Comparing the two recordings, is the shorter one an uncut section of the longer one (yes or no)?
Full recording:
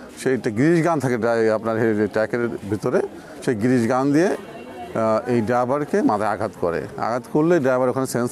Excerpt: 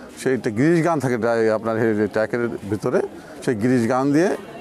yes